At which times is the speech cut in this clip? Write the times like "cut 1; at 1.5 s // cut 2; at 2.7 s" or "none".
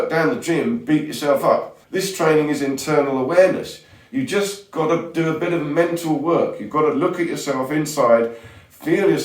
cut 1; at 1.8 s